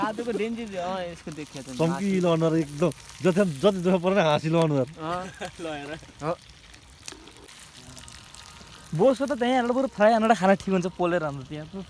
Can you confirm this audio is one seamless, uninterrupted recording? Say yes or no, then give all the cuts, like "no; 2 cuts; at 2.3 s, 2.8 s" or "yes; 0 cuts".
no; 1 cut; at 7.5 s